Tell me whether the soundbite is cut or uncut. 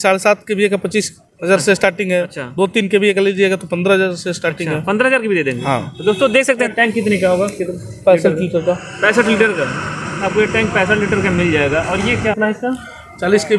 cut